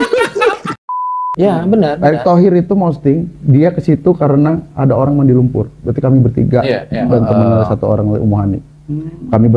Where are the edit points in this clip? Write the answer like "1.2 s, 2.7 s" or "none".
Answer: 1.1 s